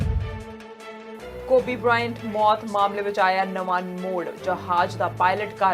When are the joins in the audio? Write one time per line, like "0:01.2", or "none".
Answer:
0:00.9